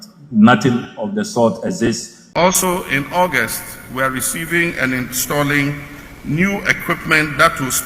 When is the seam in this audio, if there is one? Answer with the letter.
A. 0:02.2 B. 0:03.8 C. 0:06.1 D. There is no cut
A